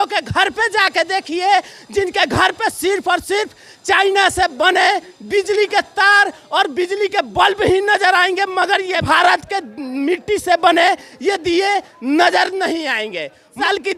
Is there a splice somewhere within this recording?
no; 0 cuts

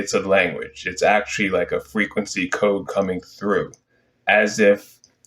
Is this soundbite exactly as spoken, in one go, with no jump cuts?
yes; 0 cuts

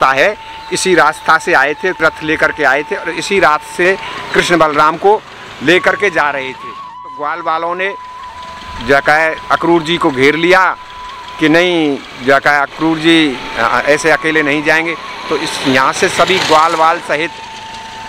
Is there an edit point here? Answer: yes; 3 cuts; at 2.0 s, 3.8 s, 7.1 s

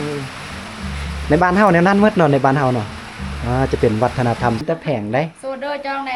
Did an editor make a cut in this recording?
yes; 1 cut; at 4.6 s

